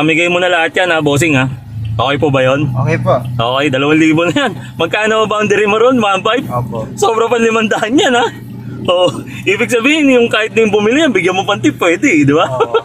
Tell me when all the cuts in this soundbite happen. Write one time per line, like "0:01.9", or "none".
none